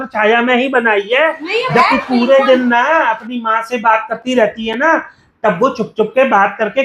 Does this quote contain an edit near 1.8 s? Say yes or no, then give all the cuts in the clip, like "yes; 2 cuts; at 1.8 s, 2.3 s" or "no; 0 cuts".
yes; 1 cut; at 1.8 s